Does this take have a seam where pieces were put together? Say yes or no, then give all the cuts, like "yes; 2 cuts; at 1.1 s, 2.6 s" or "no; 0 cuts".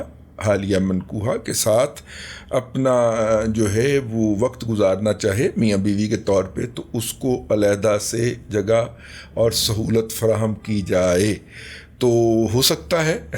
no; 0 cuts